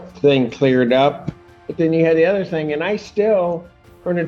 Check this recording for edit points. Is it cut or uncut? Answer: uncut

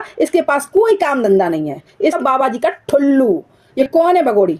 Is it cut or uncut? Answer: cut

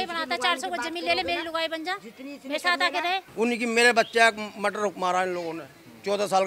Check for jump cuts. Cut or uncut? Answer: cut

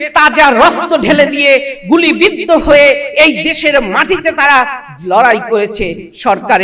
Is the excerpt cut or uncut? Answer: uncut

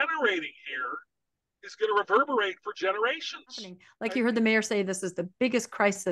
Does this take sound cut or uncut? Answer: cut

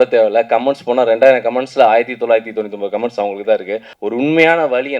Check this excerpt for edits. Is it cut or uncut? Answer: cut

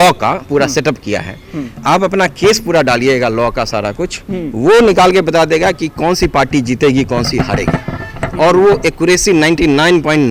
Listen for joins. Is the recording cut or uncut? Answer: uncut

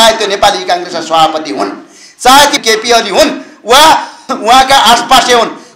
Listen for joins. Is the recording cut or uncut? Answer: cut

